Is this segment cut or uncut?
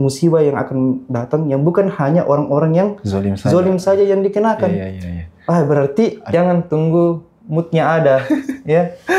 cut